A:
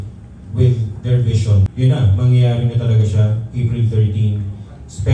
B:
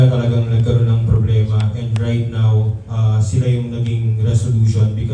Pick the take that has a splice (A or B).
A